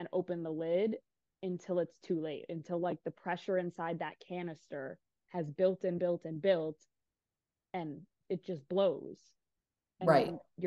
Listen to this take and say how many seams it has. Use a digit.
0